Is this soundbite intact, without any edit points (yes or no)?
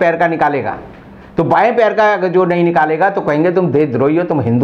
yes